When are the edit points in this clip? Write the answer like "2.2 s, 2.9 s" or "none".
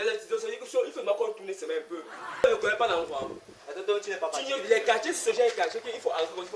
2.4 s